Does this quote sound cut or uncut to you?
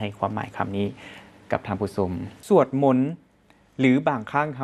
cut